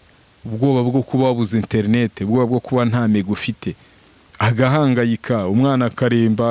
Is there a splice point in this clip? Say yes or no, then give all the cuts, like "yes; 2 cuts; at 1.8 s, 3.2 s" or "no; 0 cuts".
no; 0 cuts